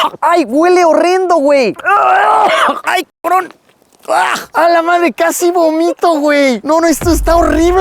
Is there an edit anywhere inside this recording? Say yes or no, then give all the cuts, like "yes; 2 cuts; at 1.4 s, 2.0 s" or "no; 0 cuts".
no; 0 cuts